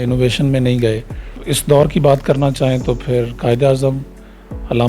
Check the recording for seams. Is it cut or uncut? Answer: cut